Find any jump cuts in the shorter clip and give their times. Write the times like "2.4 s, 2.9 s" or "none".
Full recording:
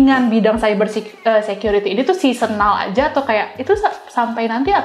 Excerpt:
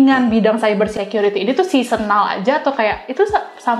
1.0 s